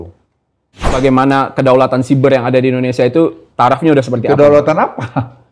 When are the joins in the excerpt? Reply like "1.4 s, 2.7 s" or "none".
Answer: 0.9 s